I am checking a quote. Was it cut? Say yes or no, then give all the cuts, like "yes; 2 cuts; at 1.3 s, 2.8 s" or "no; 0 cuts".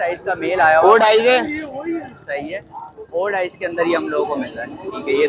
no; 0 cuts